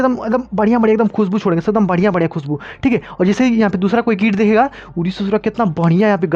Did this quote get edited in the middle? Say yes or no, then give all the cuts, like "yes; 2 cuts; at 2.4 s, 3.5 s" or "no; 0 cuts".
no; 0 cuts